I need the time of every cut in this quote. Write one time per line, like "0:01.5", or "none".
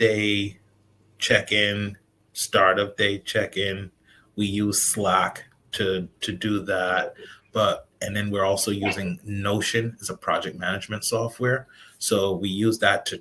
none